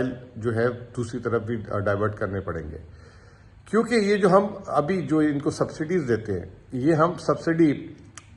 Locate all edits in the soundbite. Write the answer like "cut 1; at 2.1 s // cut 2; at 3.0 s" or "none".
none